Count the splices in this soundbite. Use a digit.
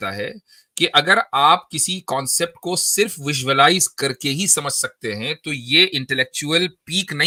0